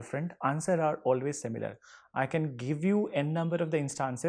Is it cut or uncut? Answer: uncut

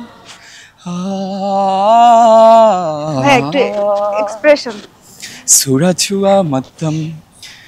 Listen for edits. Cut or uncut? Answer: uncut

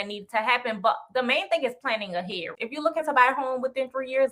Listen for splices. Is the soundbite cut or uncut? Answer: cut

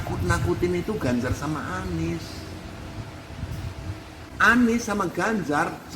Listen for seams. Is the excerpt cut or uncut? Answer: cut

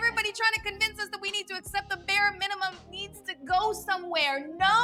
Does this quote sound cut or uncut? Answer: uncut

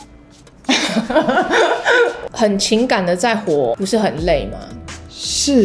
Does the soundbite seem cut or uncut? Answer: cut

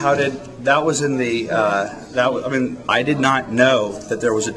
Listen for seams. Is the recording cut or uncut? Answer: cut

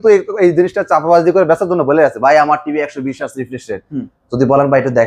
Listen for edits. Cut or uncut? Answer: uncut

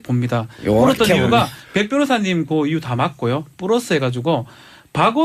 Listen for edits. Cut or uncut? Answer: cut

